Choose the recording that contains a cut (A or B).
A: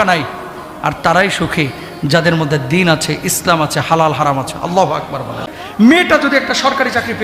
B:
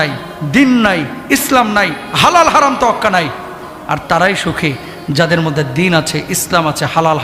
A